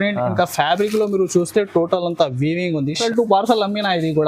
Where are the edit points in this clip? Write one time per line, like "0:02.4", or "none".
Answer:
0:03.0